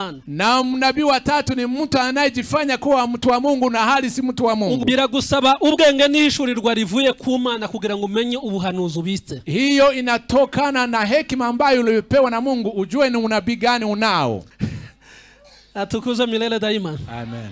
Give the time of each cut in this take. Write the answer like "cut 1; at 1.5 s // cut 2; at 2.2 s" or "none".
cut 1; at 4.8 s // cut 2; at 14.5 s